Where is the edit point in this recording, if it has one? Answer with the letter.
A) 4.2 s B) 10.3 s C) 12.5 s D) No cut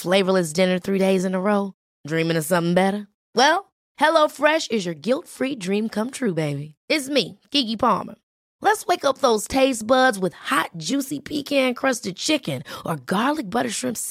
D